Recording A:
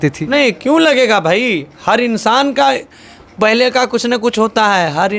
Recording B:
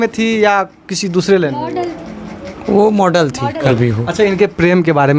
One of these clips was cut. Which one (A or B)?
B